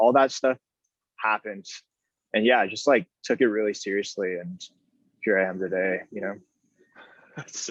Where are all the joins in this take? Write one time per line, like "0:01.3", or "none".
0:01.8